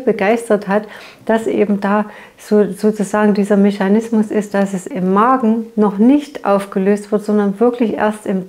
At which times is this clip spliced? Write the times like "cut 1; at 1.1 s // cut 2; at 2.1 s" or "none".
cut 1; at 4.8 s